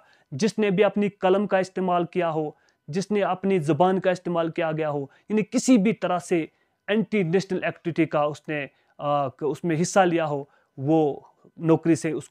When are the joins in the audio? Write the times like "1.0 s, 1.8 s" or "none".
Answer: none